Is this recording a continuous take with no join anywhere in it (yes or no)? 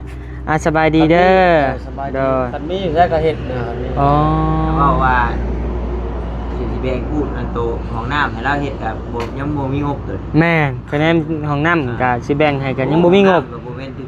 yes